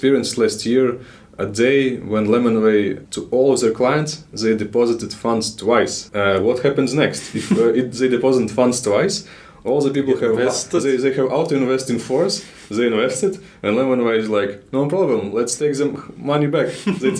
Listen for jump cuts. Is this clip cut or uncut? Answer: cut